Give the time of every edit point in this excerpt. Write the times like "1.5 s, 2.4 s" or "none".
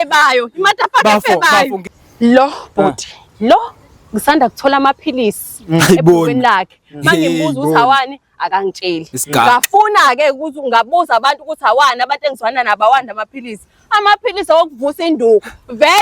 1.8 s